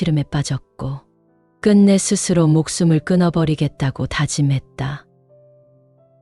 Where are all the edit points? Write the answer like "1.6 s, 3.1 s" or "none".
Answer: none

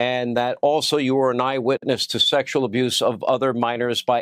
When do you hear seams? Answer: 1.8 s

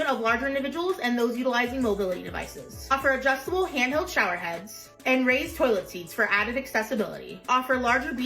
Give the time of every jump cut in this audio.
7.3 s

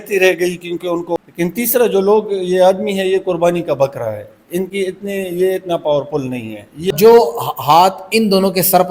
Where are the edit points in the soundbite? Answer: 1.2 s, 6.9 s

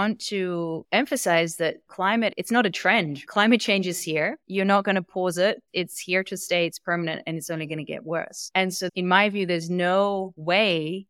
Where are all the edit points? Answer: 2.3 s, 8.9 s

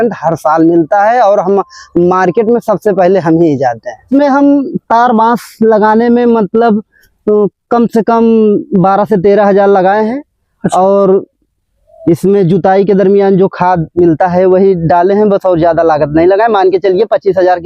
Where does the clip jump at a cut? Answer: 4.1 s

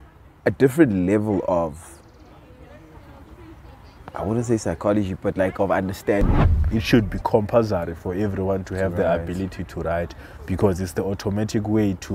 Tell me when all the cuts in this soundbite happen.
6.7 s

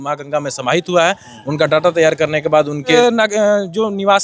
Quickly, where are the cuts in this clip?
2.9 s

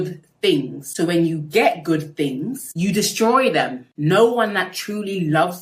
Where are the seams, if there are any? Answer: 3.8 s

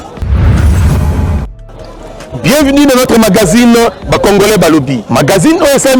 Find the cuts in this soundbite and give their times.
none

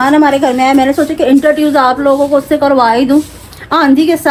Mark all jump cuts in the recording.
none

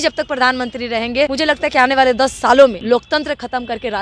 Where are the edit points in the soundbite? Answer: 1.3 s, 2.8 s

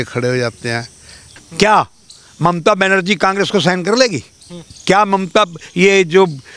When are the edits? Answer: 1.3 s

